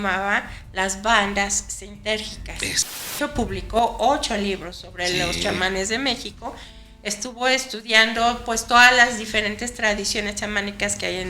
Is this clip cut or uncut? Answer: cut